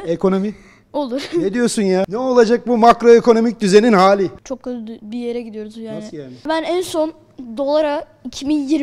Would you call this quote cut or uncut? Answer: cut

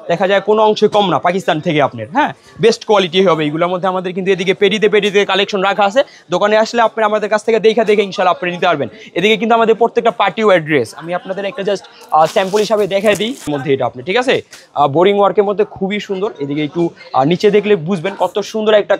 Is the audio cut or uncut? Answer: cut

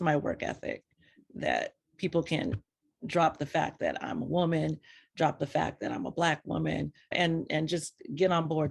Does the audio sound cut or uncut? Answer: uncut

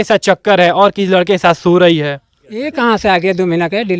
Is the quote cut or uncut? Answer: cut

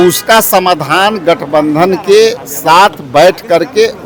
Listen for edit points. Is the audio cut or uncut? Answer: uncut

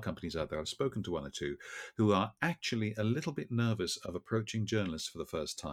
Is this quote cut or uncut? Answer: uncut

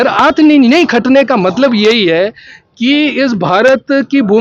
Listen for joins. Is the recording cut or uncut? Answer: uncut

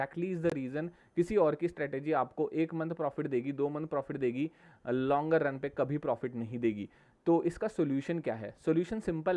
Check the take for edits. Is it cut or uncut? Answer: uncut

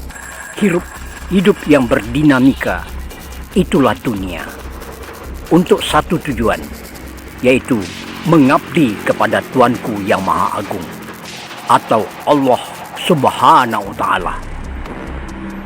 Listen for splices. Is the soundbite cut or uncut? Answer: uncut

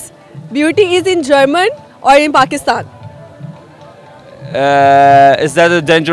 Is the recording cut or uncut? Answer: uncut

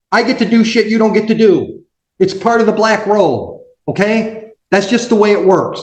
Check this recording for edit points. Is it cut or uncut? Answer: uncut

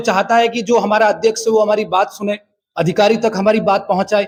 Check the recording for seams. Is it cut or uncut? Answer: uncut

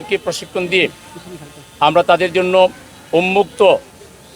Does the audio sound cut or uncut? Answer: uncut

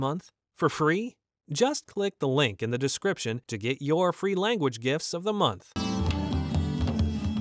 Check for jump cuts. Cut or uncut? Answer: cut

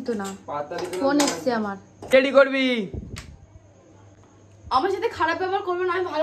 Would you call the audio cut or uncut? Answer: cut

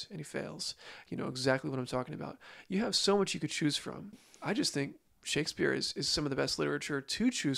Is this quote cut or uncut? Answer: cut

